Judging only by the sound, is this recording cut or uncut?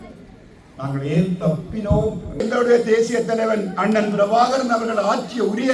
cut